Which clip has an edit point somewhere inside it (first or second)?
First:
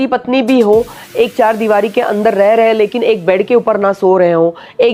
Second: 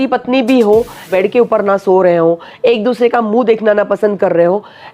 second